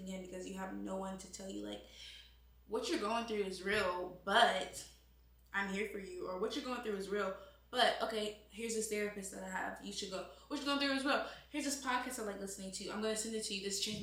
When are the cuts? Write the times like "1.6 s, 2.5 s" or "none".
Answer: none